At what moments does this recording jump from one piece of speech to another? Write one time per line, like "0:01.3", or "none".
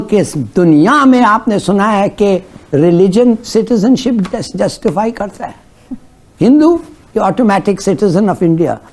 none